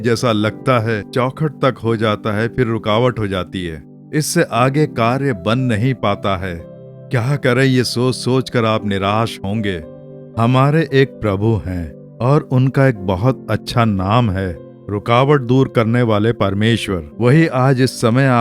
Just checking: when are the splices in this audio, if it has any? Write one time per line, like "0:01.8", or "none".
0:17.0

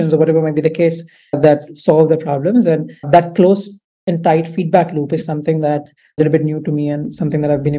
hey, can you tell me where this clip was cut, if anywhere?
0:06.2

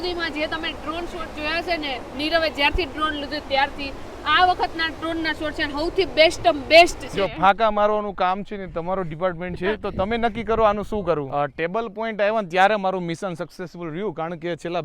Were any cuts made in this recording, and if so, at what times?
0:07.0
0:11.3

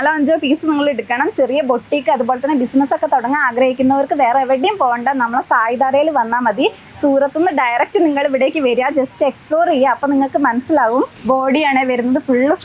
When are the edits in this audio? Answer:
none

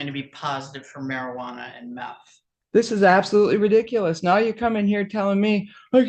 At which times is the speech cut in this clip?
0:02.7

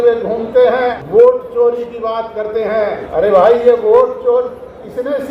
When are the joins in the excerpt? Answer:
0:01.0
0:03.0

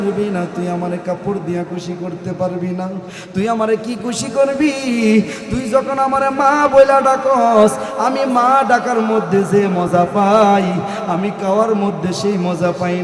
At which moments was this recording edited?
none

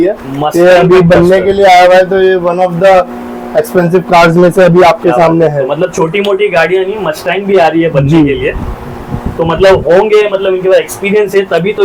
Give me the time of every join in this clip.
none

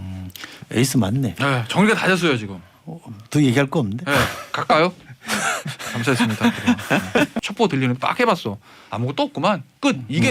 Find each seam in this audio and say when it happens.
0:07.4

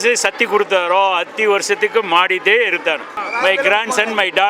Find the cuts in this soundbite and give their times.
0:03.2

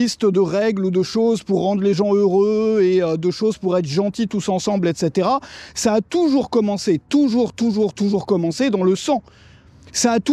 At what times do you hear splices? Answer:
none

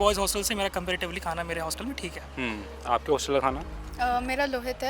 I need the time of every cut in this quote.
none

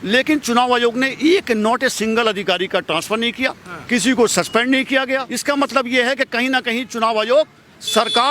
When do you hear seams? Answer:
0:05.3

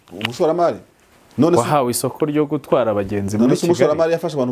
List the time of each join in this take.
none

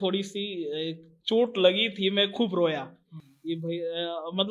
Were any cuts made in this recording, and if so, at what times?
none

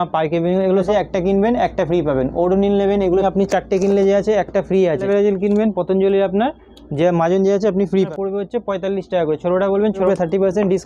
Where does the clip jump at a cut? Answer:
0:00.9
0:03.2
0:05.0
0:08.1
0:10.1

